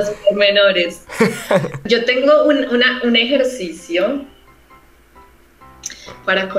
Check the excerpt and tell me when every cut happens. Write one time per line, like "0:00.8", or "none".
0:01.8